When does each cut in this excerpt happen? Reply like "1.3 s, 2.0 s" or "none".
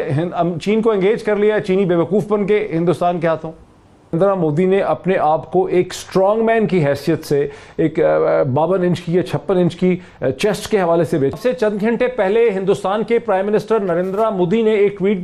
4.1 s, 11.3 s